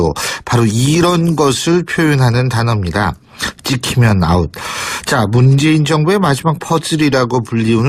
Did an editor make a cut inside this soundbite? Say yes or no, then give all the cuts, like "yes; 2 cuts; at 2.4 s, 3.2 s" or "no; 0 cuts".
no; 0 cuts